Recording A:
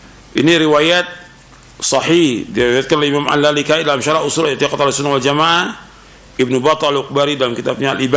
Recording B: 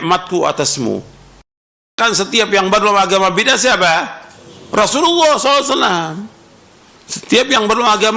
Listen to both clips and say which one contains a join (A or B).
B